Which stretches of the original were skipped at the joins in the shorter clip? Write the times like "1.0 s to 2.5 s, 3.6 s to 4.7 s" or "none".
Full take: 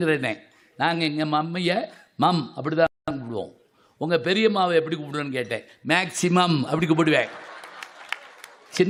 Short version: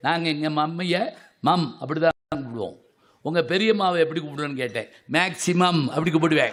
none